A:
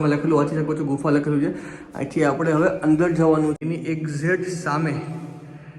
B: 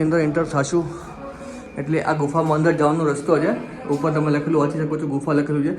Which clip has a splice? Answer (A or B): A